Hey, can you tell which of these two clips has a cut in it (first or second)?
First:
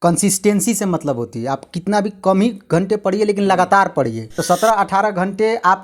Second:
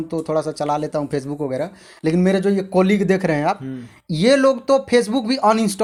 first